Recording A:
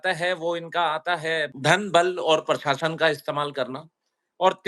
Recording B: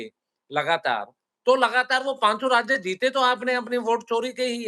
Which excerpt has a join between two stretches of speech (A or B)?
A